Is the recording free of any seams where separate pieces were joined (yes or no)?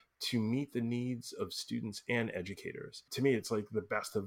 no